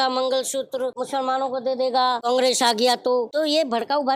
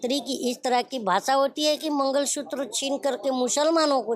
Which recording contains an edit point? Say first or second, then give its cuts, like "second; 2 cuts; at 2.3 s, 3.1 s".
first; 3 cuts; at 1.0 s, 2.2 s, 3.3 s